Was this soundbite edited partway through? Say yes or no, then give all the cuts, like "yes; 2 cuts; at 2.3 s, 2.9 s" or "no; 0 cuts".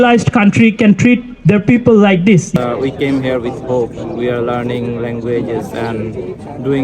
yes; 1 cut; at 2.5 s